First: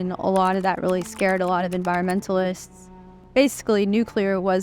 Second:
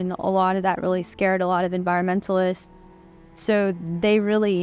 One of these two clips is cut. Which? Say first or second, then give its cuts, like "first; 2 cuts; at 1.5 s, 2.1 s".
first; 1 cut; at 3.2 s